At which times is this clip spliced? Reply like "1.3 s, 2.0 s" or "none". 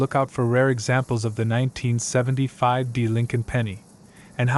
none